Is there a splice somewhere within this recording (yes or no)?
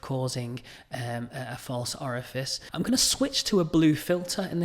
yes